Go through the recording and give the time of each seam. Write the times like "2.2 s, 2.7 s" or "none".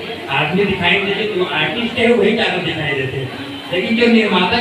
none